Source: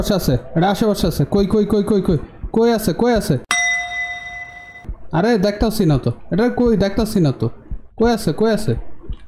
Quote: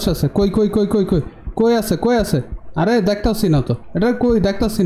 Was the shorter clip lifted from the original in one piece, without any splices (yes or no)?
no